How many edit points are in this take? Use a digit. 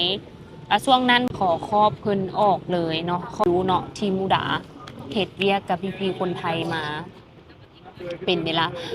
2